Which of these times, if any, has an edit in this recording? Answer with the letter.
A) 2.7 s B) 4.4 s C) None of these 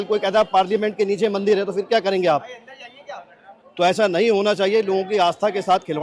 C